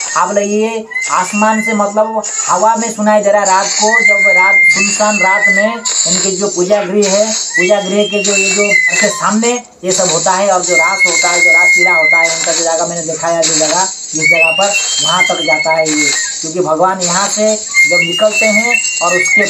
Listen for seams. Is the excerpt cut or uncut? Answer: uncut